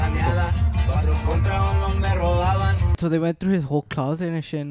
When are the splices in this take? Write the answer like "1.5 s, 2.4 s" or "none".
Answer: 3.0 s